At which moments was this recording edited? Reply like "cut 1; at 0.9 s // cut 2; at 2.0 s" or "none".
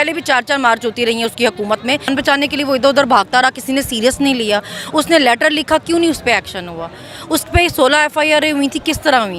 cut 1; at 2.1 s